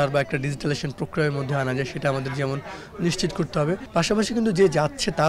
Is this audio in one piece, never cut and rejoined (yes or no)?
no